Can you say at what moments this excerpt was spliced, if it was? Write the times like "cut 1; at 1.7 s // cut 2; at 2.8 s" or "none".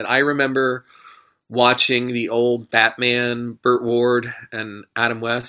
none